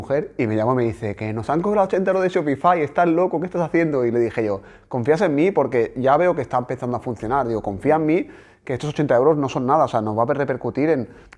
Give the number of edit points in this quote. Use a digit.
0